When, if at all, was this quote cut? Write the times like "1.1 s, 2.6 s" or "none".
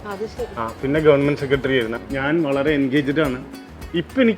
2.0 s